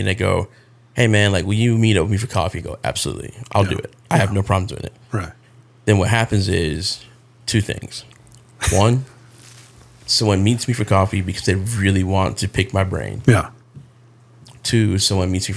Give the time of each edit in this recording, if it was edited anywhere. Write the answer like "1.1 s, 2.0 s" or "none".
none